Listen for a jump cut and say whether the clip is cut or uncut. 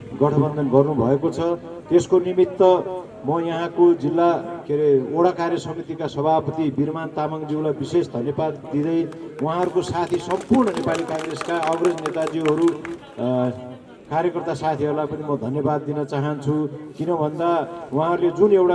uncut